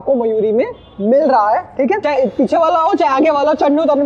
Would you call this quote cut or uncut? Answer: cut